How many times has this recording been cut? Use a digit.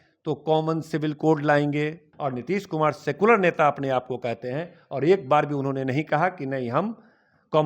1